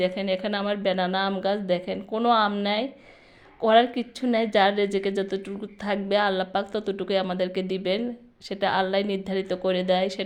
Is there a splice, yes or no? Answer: no